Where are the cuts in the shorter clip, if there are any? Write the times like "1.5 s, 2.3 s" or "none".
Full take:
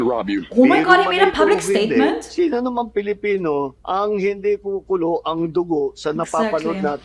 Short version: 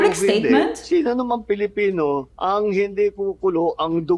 none